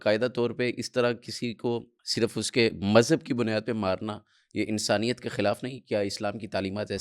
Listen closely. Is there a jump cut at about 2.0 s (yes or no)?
yes